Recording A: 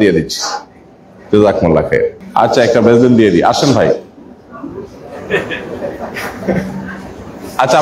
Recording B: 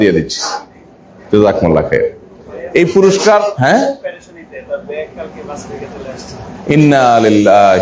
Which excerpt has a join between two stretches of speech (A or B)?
A